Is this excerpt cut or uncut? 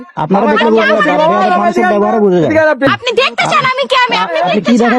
cut